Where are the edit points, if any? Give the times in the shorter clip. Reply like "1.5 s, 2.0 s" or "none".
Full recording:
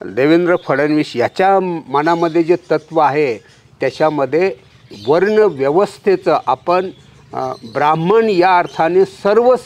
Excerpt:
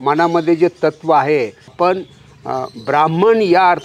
1.7 s